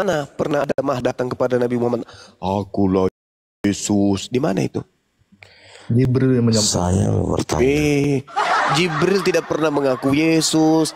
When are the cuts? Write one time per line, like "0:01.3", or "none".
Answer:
0:03.1